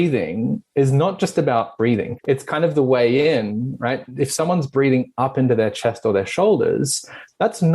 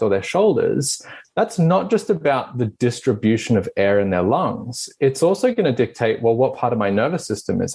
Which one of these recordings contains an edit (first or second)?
first